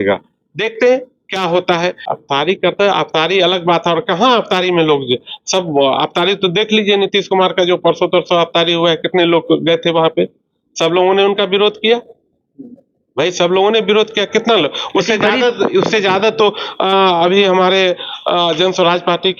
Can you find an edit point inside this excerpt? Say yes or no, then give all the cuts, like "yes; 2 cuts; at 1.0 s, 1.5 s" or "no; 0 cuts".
yes; 1 cut; at 2.0 s